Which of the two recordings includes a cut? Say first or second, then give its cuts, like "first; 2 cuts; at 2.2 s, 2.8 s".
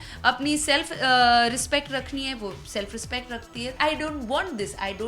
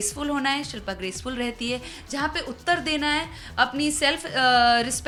first; 1 cut; at 3.8 s